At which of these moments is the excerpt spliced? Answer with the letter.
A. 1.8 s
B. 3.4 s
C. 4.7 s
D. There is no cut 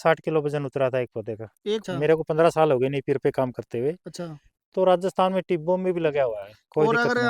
A